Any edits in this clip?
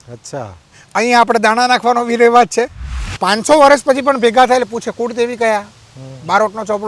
yes; 1 cut; at 3.1 s

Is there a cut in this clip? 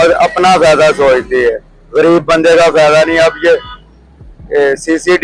no; 0 cuts

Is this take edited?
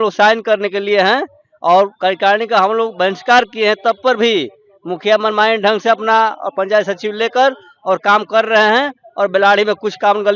no; 0 cuts

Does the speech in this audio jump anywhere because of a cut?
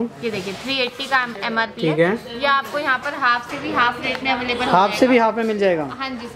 no; 0 cuts

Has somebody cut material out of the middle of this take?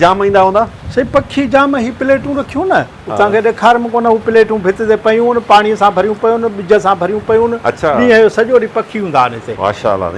no; 0 cuts

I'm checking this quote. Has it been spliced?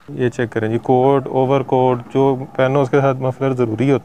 no; 0 cuts

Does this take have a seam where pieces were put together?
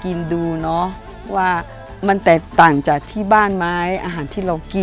no; 0 cuts

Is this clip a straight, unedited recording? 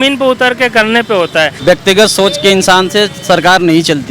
no; 1 cut; at 1.5 s

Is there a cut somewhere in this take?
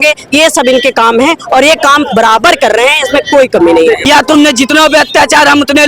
yes; 1 cut; at 4.0 s

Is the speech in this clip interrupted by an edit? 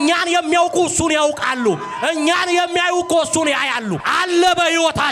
yes; 1 cut; at 4.1 s

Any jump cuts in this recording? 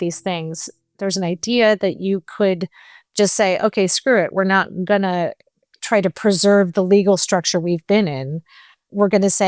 yes; 1 cut; at 1.0 s

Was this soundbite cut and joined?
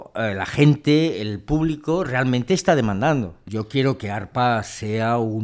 yes; 1 cut; at 3.4 s

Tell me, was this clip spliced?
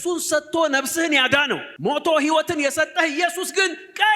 yes; 1 cut; at 1.7 s

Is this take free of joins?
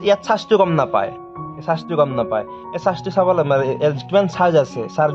yes; 0 cuts

